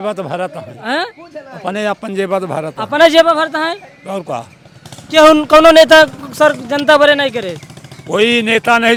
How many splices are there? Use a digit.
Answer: 0